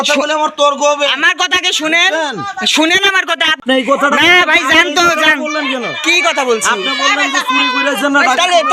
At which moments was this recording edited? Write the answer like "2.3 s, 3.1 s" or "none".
3.6 s